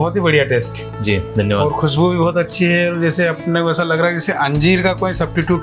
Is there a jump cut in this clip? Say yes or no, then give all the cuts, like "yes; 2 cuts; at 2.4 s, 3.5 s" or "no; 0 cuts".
no; 0 cuts